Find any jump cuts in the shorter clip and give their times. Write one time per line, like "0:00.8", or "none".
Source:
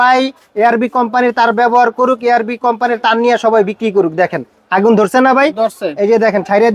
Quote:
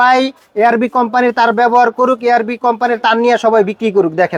none